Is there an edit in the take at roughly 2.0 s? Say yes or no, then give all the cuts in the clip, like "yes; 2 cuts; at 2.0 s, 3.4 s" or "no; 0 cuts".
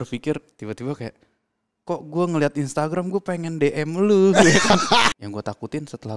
no; 1 cut; at 5.1 s